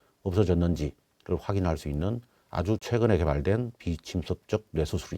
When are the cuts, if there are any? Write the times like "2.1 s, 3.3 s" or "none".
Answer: 2.8 s